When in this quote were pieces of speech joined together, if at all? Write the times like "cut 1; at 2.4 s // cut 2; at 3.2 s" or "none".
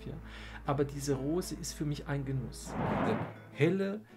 cut 1; at 2.9 s